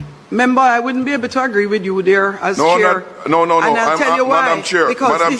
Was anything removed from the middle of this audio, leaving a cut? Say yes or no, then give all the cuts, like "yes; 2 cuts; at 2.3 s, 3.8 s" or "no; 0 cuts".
no; 0 cuts